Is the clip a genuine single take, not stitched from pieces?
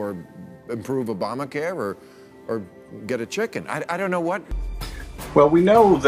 no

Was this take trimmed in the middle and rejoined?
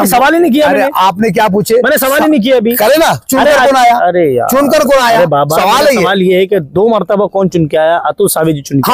no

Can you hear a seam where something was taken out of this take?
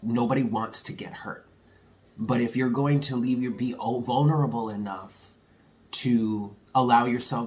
yes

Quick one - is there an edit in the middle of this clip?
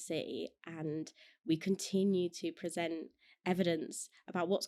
no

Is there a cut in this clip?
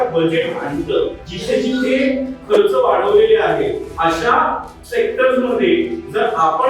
yes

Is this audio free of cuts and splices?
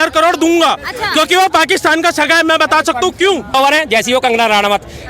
no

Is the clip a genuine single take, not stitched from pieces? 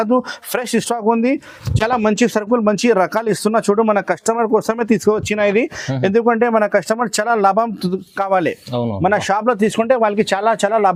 yes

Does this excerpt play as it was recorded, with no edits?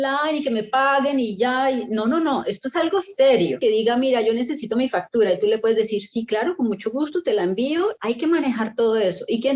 no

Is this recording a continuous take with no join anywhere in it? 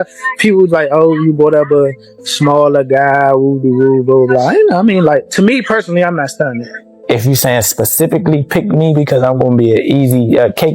no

